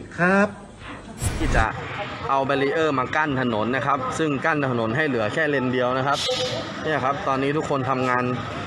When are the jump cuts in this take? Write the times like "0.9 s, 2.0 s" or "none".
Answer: 1.3 s

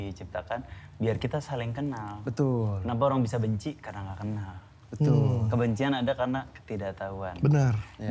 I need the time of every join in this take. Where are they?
none

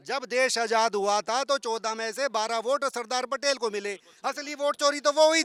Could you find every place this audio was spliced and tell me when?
none

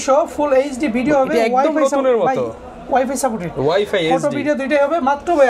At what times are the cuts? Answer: none

